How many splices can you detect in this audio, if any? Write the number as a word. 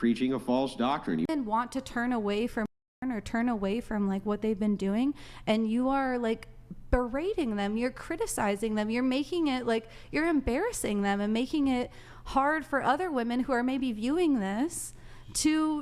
one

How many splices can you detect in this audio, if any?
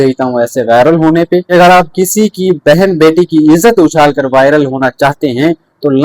one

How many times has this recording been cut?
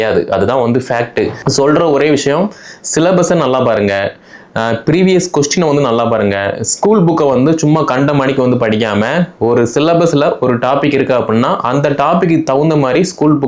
one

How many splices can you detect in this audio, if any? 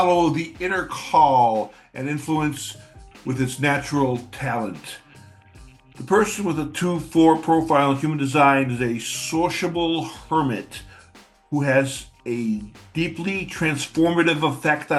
zero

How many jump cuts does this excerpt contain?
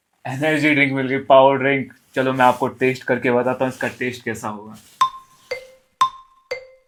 zero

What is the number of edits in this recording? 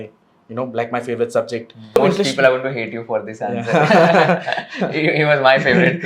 one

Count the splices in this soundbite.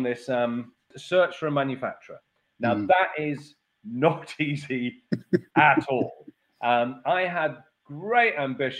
one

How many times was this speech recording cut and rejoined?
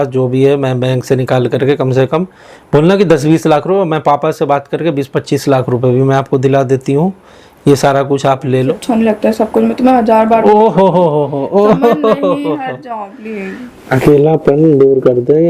one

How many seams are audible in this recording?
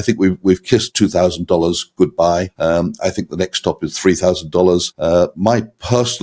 three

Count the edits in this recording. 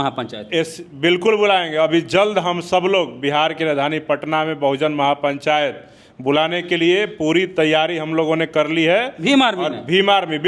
zero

